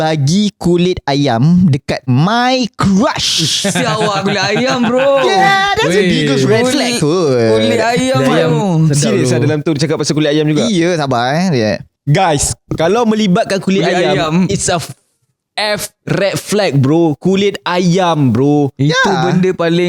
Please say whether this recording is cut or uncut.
uncut